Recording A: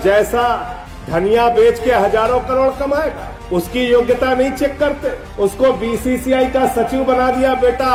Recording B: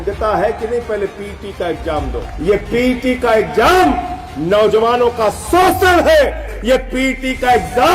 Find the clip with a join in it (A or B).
B